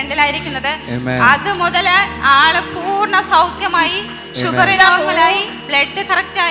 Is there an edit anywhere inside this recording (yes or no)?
no